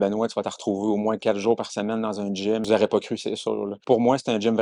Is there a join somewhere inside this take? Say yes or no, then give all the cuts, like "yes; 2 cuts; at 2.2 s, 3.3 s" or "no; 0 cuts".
yes; 2 cuts; at 2.6 s, 3.7 s